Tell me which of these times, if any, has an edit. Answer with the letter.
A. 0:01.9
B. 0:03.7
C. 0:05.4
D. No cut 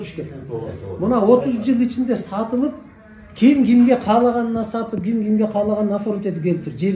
D